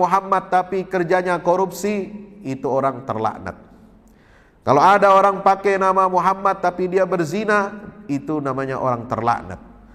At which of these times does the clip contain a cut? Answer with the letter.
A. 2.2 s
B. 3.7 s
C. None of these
C